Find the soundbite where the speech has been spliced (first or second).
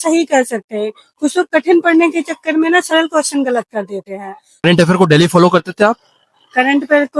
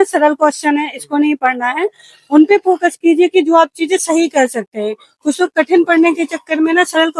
first